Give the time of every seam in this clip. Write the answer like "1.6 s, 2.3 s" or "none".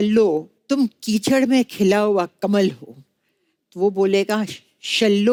none